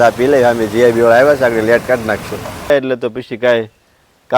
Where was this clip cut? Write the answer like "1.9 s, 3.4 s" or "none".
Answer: 2.7 s